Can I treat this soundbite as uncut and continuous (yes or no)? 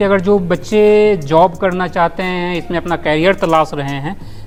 yes